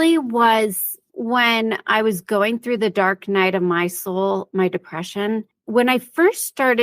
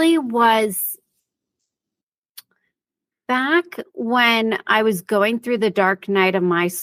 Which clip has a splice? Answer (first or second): first